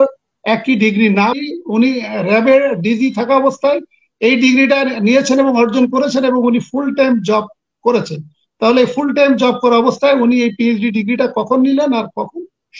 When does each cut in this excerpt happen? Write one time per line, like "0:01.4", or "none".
0:01.4